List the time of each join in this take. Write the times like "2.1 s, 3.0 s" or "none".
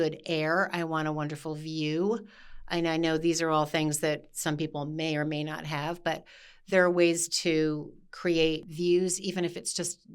8.7 s